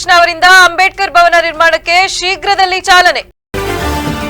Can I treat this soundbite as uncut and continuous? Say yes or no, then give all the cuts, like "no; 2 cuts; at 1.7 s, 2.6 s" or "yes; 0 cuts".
no; 1 cut; at 3.3 s